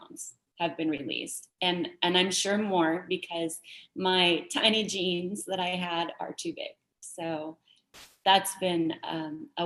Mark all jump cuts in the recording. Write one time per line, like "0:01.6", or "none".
none